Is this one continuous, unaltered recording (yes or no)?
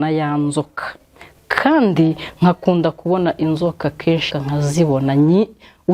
no